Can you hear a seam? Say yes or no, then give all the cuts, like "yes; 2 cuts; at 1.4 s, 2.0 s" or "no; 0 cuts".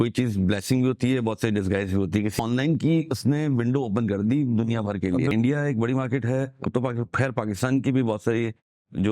yes; 2 cuts; at 2.3 s, 5.3 s